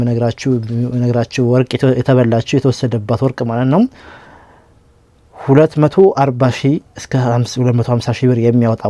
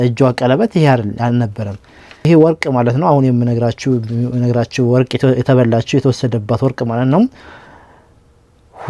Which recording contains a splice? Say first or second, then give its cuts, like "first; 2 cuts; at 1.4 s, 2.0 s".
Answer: second; 1 cut; at 2.3 s